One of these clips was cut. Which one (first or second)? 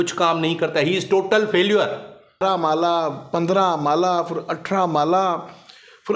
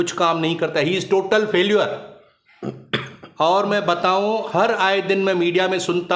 first